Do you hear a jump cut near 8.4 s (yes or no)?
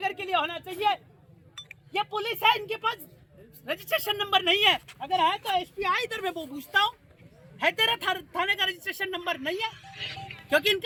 no